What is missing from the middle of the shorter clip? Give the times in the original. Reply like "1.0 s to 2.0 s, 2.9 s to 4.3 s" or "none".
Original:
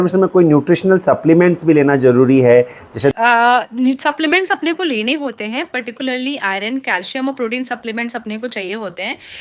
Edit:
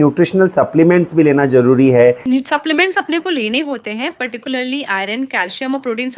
2.7 s to 3.7 s